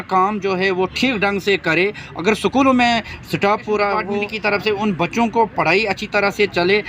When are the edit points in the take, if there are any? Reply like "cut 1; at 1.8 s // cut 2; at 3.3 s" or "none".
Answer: cut 1; at 4.3 s

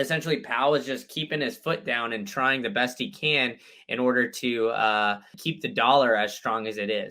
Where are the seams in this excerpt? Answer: cut 1; at 5.4 s

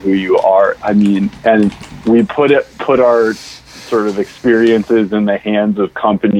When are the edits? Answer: cut 1; at 1.8 s

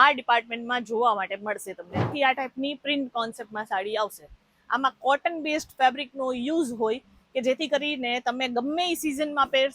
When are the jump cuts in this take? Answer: cut 1; at 2.1 s

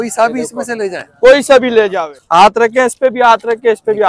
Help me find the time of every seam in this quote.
cut 1; at 1.9 s

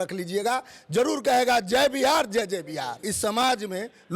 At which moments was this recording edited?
cut 1; at 3.1 s

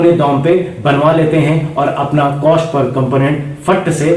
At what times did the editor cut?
none

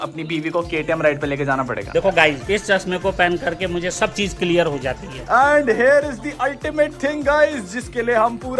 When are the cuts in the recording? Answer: cut 1; at 1.9 s // cut 2; at 5.3 s

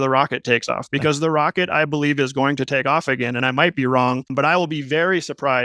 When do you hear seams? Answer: cut 1; at 3.4 s // cut 2; at 4.3 s

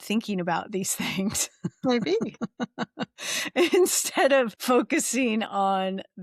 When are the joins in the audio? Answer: cut 1; at 4.6 s

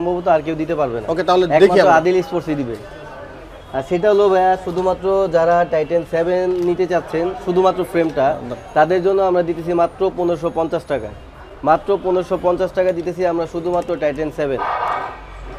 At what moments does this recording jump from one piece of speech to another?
none

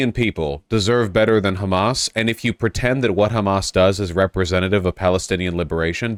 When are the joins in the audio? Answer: none

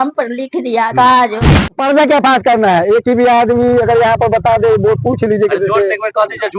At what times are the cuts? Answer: cut 1; at 1.8 s

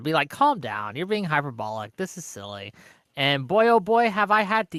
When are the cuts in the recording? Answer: none

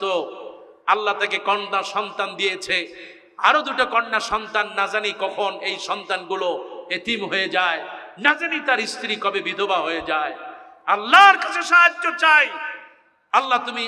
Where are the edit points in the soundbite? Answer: none

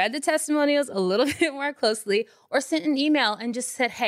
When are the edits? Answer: none

